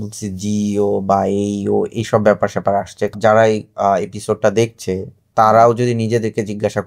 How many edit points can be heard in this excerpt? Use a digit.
1